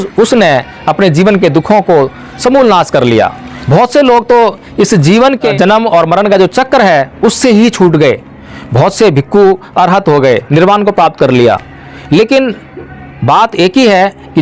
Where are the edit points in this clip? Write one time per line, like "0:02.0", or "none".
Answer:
0:05.5